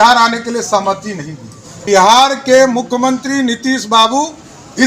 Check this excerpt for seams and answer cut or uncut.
cut